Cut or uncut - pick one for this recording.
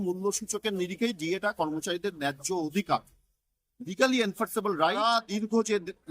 cut